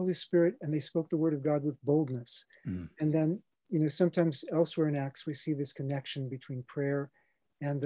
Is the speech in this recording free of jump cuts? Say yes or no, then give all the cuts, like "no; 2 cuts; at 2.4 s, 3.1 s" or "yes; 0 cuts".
no; 1 cut; at 3.5 s